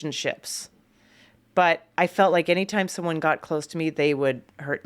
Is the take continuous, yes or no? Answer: no